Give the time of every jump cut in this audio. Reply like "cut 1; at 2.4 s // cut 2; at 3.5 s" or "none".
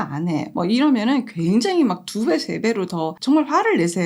cut 1; at 3.1 s